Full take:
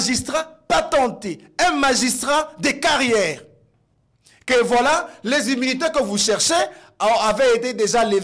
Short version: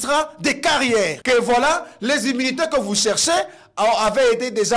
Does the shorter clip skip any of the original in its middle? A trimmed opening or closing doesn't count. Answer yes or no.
yes